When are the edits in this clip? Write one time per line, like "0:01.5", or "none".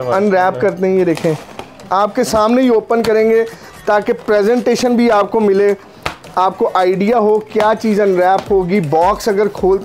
none